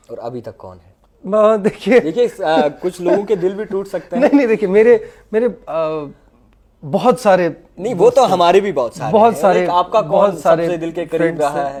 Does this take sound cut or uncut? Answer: uncut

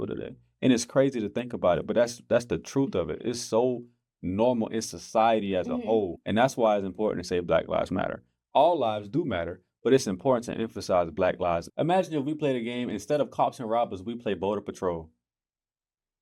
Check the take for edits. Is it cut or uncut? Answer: cut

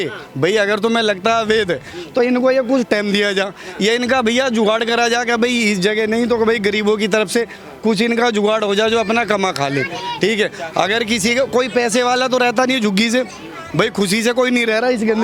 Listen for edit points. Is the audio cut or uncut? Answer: uncut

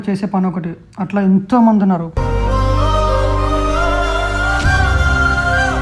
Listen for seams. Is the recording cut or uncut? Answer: uncut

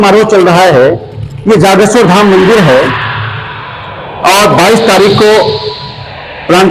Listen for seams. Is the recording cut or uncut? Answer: uncut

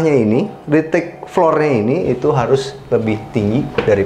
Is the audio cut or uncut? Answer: uncut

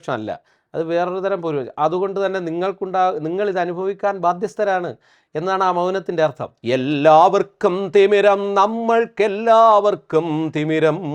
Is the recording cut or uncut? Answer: cut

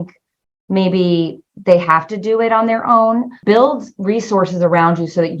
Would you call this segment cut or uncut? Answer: cut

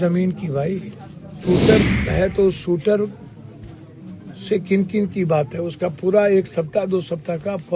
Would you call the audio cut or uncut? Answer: cut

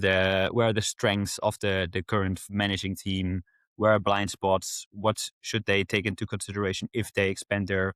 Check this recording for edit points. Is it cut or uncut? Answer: uncut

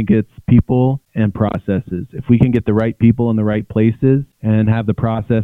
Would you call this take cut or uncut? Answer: cut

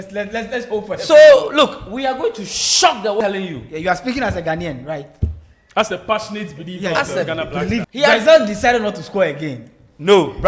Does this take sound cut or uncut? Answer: cut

